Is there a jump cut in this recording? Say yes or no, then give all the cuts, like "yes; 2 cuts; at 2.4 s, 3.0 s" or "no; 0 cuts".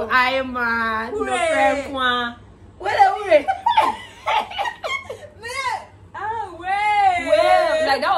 no; 0 cuts